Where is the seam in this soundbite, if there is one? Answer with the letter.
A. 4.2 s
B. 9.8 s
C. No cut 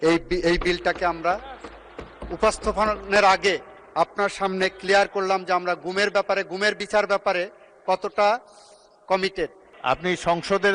B